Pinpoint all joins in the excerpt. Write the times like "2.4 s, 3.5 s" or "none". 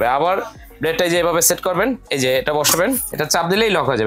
2.1 s, 3.1 s